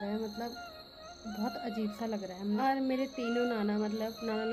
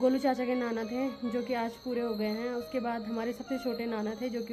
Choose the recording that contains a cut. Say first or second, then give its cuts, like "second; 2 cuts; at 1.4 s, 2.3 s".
first; 1 cut; at 2.6 s